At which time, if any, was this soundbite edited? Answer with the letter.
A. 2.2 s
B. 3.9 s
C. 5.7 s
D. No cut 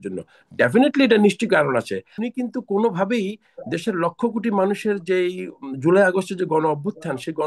A